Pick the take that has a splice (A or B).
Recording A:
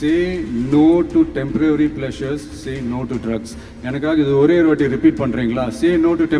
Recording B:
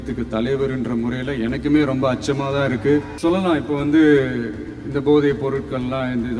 B